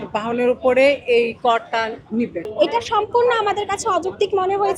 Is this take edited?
yes; 1 cut; at 2.4 s

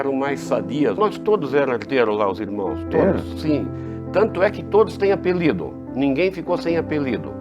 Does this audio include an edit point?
yes; 1 cut; at 1.0 s

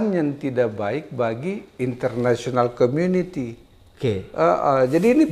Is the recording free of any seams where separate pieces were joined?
yes; 0 cuts

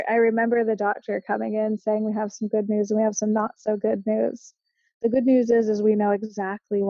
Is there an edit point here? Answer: no; 0 cuts

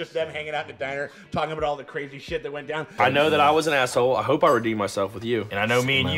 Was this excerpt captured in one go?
no; 1 cut; at 3.0 s

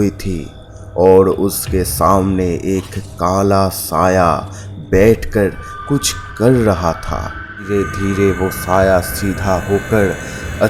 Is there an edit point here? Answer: yes; 1 cut; at 7.7 s

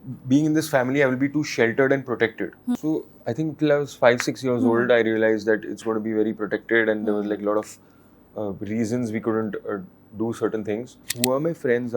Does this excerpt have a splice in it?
yes; 2 cuts; at 2.8 s, 11.0 s

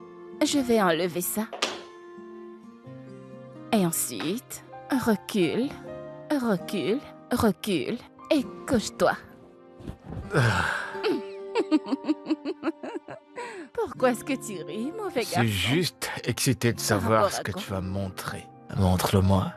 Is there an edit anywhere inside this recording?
no; 0 cuts

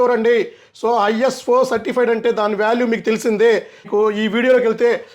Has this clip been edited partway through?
yes; 1 cut; at 3.9 s

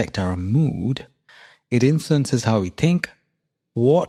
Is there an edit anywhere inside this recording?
no; 0 cuts

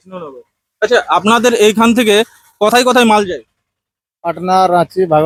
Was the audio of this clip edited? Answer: no; 0 cuts

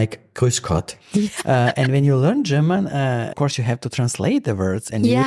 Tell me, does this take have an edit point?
yes; 1 cut; at 3.2 s

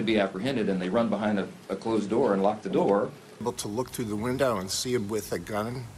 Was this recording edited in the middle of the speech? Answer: no; 0 cuts

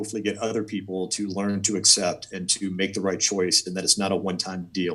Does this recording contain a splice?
no; 0 cuts

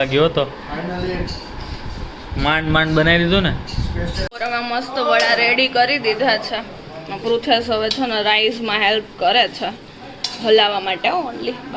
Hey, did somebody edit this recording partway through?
yes; 1 cut; at 4.2 s

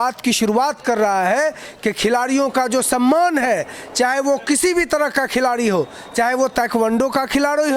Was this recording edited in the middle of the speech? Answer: no; 0 cuts

